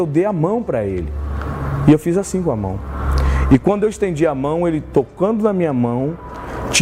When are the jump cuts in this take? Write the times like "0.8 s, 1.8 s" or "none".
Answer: none